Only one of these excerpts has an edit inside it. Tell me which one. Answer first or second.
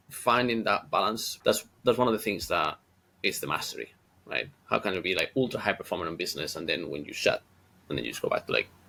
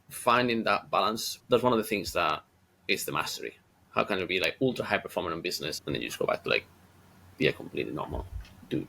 second